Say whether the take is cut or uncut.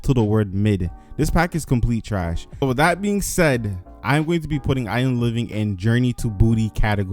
cut